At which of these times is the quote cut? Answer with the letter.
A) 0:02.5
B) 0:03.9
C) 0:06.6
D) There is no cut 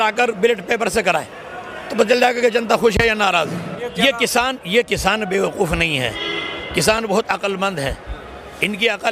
B